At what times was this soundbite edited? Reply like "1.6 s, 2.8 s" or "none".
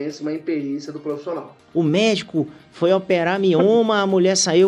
1.5 s